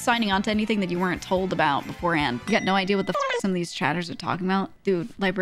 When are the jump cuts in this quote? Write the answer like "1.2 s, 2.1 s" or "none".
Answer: 2.4 s